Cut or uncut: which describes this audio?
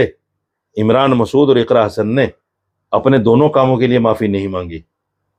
uncut